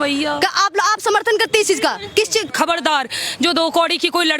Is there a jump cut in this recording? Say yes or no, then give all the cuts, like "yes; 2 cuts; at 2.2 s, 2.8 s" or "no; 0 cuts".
yes; 1 cut; at 2.5 s